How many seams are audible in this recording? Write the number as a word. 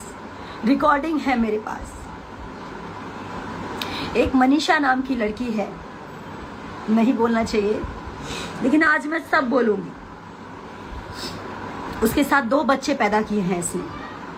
zero